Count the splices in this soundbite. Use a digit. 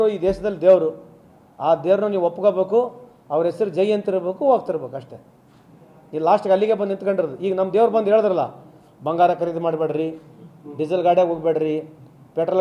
0